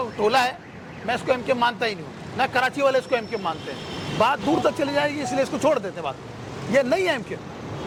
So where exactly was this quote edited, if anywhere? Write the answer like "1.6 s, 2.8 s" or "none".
none